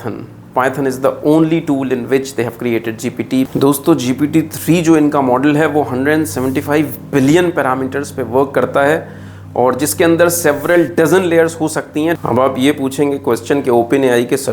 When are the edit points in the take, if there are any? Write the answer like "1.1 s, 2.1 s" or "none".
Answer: 3.5 s, 12.2 s